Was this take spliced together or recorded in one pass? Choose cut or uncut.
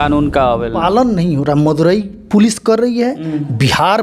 uncut